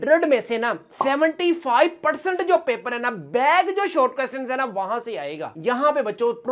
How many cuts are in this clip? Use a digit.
1